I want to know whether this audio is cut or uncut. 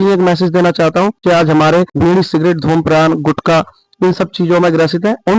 cut